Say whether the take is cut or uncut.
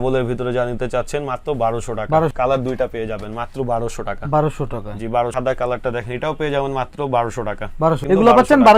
cut